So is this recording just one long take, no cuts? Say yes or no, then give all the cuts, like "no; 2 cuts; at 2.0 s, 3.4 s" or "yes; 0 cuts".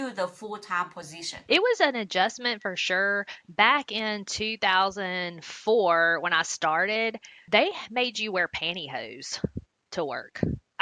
yes; 0 cuts